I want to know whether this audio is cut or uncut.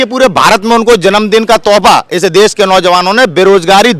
uncut